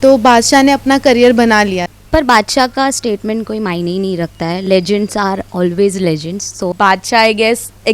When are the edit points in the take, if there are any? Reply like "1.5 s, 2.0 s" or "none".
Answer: 1.9 s, 6.7 s